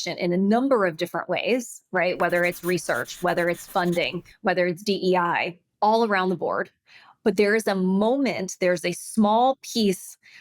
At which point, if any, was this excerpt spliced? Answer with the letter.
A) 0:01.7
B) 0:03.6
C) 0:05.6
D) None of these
C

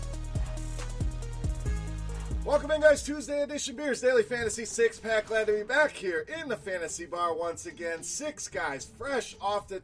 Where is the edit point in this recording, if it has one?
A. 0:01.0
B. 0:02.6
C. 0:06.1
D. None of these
D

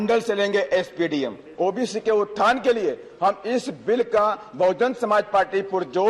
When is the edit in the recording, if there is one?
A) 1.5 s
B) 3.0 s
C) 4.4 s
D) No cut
A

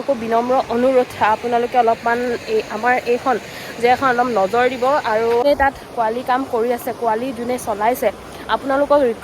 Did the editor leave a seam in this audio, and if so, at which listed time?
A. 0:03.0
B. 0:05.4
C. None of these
B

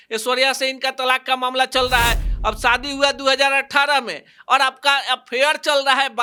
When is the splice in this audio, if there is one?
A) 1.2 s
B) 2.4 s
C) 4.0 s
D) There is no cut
D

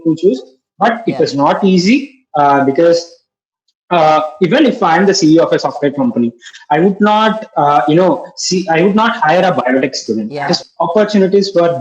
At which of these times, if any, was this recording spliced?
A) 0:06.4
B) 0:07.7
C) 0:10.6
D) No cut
C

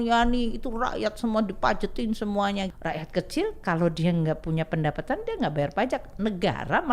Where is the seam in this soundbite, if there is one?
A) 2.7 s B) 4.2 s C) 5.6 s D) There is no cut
A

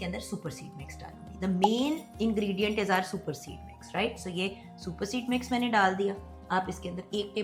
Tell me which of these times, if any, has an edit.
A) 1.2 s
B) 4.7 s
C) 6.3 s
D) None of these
D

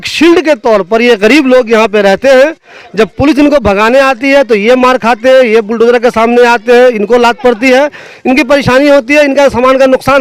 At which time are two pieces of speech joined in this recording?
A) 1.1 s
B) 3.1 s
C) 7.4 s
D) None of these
D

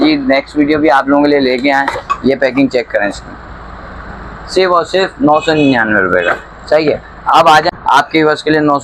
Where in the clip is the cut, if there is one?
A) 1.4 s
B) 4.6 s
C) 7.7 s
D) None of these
C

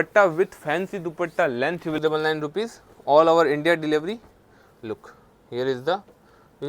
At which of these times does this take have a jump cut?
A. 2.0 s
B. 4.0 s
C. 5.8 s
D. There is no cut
A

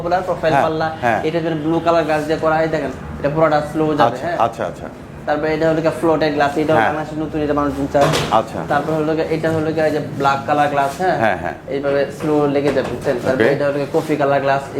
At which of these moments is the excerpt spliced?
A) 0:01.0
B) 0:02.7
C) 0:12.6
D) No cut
D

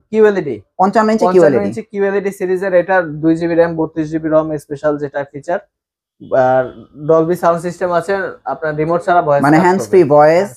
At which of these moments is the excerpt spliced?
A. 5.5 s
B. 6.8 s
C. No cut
C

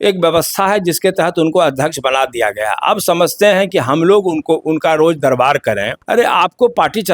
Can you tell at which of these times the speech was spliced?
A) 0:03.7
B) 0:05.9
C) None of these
B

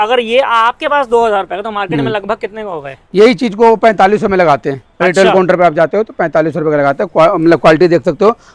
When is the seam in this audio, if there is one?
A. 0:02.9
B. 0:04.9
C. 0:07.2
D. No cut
D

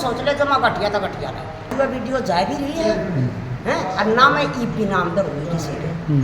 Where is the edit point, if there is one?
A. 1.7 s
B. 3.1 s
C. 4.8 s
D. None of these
A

